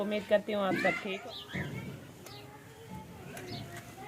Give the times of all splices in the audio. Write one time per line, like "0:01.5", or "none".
0:01.1